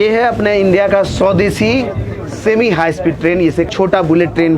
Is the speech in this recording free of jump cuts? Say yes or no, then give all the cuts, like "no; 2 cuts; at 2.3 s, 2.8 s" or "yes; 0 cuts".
no; 1 cut; at 3.7 s